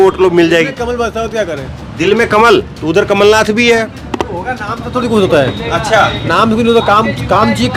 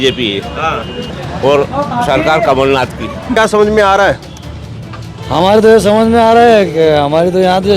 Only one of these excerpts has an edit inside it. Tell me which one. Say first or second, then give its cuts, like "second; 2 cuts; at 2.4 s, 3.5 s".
second; 2 cuts; at 1.1 s, 3.4 s